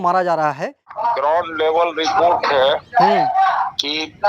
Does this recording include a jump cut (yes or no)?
yes